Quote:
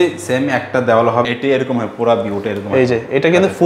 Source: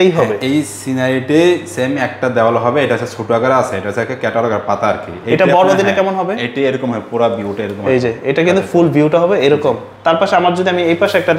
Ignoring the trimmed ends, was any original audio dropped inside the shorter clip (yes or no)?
yes